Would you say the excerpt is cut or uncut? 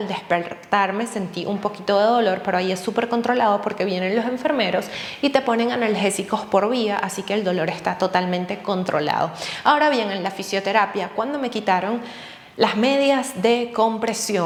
uncut